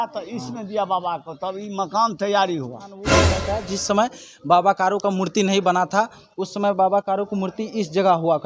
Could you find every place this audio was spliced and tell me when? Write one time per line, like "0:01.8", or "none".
0:03.3